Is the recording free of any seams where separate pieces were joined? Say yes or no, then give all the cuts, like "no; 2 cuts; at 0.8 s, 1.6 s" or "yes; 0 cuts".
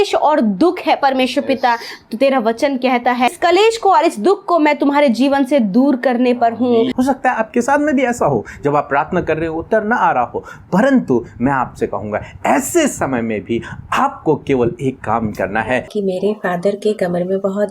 no; 3 cuts; at 3.3 s, 6.9 s, 15.9 s